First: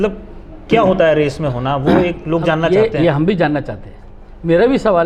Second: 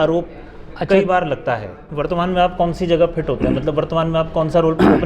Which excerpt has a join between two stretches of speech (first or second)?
second